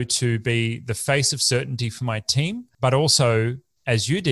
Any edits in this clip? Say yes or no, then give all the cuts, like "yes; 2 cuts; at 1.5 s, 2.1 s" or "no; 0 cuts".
yes; 1 cut; at 2.7 s